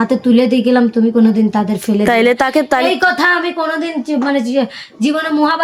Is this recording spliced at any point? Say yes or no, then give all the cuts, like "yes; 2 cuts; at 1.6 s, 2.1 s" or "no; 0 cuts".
no; 0 cuts